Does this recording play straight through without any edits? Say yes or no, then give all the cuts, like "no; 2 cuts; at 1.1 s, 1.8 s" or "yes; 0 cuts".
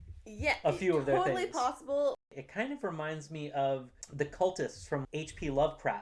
no; 2 cuts; at 2.3 s, 5.0 s